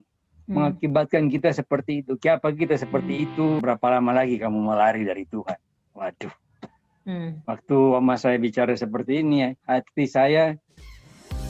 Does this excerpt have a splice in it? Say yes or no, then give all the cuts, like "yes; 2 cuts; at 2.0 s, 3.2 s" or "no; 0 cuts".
yes; 1 cut; at 3.6 s